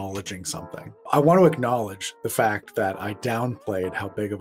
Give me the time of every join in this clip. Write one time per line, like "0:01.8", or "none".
0:00.9

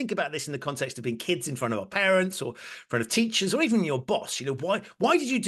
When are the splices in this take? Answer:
none

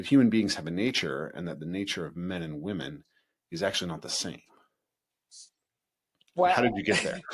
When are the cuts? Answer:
none

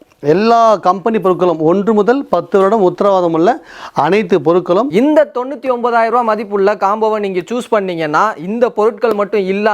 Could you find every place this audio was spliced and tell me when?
0:04.9

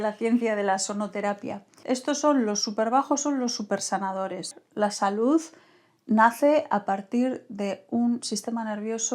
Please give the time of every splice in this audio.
0:01.7
0:04.6

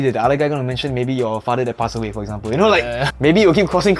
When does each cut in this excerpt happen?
0:03.0

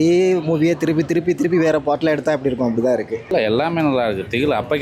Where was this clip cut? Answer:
0:03.2

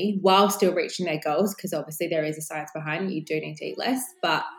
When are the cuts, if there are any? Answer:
none

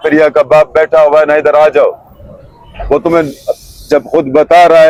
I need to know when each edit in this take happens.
none

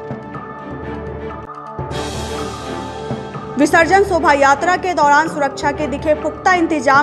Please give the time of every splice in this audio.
0:03.4

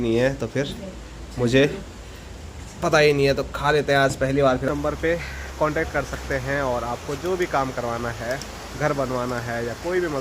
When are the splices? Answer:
0:04.7

